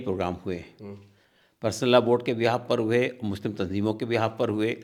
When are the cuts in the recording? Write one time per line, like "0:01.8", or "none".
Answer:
none